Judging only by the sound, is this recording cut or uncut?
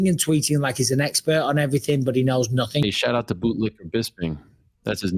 cut